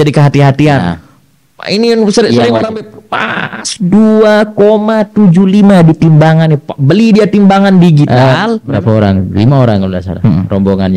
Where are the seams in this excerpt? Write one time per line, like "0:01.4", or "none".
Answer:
0:08.7